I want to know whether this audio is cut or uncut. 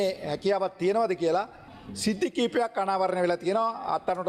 cut